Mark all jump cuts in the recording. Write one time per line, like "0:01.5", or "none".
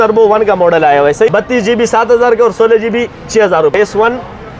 0:01.3
0:03.7